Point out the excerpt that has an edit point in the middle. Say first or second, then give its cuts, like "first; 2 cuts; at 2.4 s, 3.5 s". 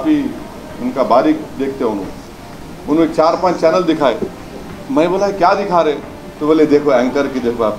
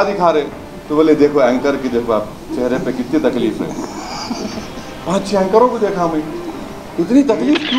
second; 1 cut; at 6.7 s